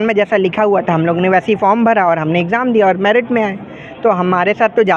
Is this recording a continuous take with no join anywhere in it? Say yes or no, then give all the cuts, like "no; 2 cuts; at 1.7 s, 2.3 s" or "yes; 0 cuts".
yes; 0 cuts